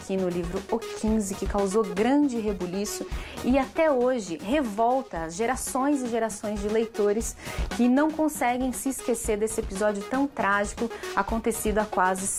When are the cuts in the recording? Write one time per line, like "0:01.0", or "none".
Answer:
none